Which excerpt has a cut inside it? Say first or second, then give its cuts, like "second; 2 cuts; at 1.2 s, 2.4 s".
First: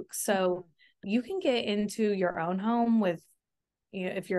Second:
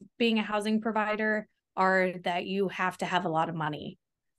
first; 1 cut; at 1.0 s